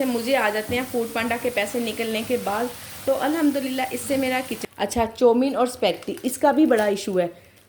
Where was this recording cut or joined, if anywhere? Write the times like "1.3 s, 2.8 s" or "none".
4.5 s